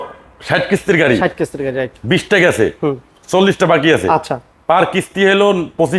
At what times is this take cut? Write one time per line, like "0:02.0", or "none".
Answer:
none